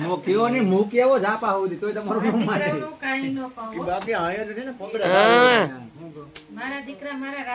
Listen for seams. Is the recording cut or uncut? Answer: uncut